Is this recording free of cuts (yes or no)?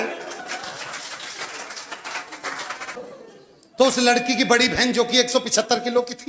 no